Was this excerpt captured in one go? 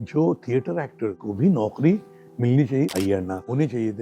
no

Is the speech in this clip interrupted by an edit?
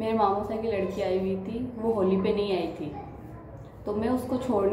no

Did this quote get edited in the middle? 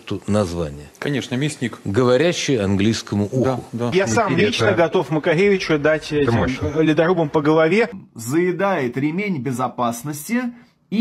yes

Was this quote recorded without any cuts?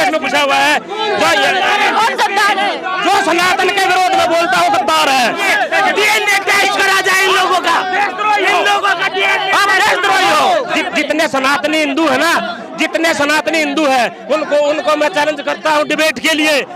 no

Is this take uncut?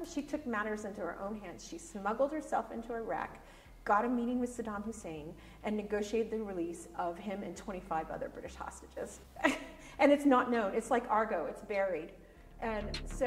yes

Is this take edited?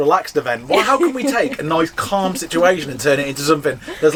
no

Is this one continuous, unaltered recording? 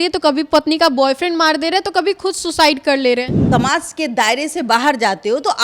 no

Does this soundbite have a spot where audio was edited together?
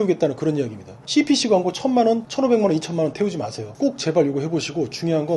yes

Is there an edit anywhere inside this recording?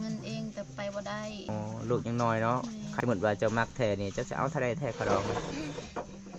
yes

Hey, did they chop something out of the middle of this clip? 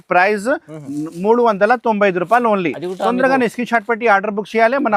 no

